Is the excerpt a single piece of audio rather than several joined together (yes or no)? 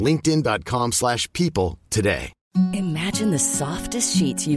no